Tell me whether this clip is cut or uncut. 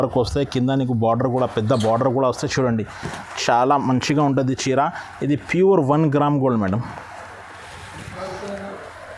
uncut